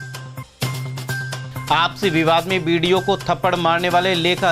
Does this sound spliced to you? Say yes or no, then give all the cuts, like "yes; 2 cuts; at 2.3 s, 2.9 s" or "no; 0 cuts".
yes; 1 cut; at 1.3 s